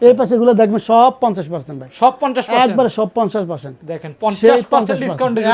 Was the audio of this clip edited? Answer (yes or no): no